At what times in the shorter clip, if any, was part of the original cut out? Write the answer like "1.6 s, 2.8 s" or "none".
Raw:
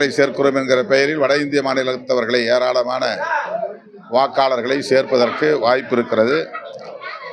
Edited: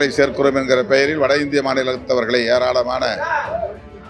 none